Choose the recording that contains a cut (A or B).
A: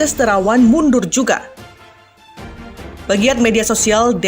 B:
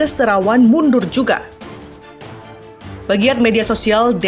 A